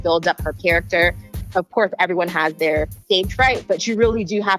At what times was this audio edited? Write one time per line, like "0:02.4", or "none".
0:01.3
0:02.9